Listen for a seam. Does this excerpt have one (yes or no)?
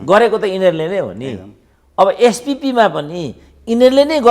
no